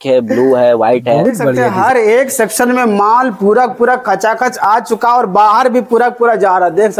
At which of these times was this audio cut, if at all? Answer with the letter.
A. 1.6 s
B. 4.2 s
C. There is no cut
A